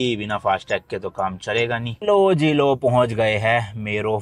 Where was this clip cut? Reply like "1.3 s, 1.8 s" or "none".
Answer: 1.9 s